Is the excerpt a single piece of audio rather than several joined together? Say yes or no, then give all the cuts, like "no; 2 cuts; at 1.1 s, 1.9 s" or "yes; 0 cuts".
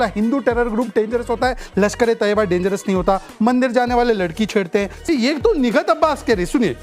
no; 1 cut; at 5.1 s